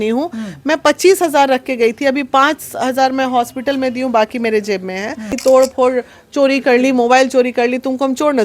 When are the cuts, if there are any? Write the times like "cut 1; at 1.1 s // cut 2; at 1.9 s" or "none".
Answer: cut 1; at 5.4 s